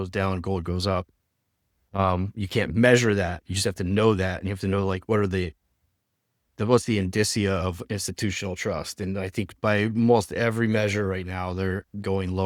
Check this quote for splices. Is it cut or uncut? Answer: uncut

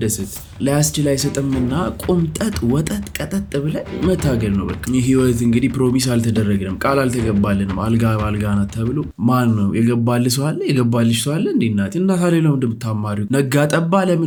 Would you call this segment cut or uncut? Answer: uncut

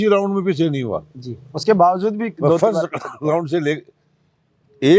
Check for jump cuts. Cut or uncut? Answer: uncut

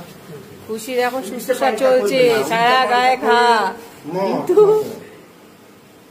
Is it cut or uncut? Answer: uncut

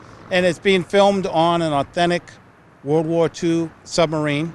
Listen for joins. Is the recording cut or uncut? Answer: uncut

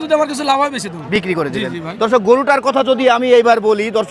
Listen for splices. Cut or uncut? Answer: uncut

